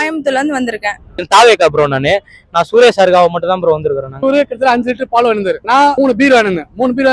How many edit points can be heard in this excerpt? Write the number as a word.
three